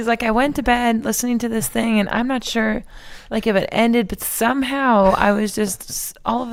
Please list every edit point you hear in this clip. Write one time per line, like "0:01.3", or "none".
none